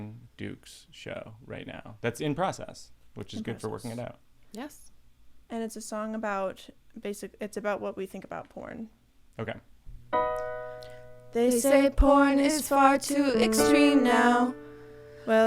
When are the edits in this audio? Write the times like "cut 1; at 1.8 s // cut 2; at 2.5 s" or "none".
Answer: cut 1; at 9.9 s